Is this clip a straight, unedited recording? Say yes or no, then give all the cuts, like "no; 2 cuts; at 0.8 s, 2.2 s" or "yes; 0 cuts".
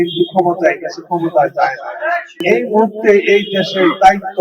no; 1 cut; at 2.4 s